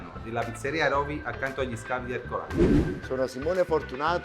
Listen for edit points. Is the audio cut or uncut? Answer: cut